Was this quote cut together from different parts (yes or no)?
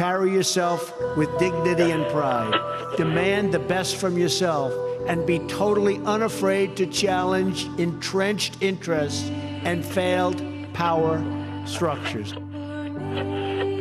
no